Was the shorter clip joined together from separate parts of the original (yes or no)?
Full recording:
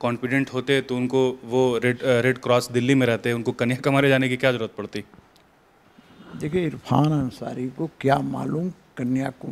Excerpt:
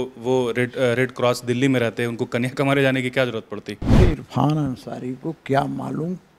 yes